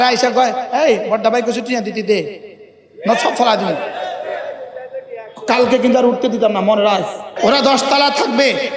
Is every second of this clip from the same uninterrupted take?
no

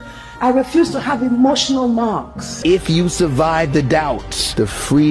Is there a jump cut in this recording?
yes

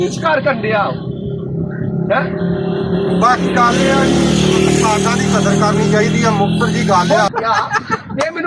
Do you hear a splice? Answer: yes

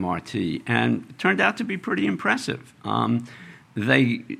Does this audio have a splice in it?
no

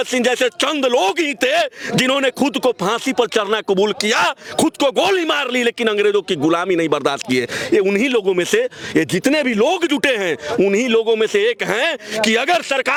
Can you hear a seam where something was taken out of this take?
no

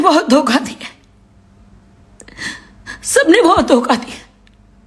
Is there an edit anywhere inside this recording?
yes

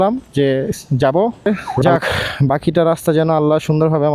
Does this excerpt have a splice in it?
yes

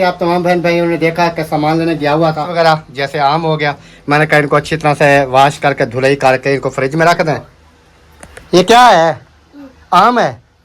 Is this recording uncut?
no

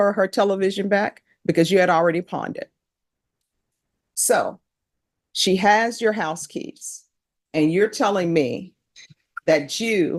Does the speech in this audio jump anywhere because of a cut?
no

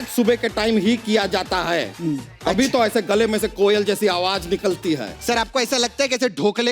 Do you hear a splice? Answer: yes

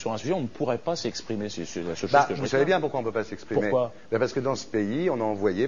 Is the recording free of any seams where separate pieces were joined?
no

